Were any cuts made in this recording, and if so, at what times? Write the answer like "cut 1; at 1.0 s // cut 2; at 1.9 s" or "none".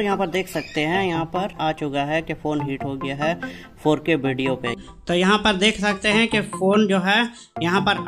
cut 1; at 1.6 s // cut 2; at 4.8 s